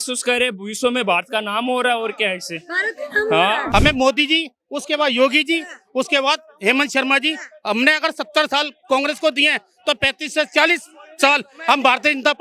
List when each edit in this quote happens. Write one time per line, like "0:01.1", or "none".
0:03.6